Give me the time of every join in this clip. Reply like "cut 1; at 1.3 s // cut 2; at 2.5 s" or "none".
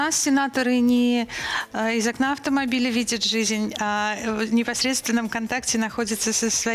none